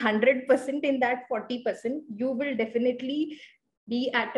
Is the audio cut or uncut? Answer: uncut